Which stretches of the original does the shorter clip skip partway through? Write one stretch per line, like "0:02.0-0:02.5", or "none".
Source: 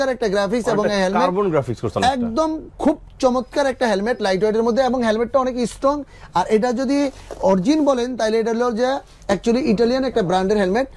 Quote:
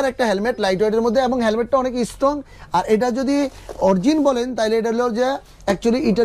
none